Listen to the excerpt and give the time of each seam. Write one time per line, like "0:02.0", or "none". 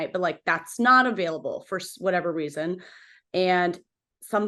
none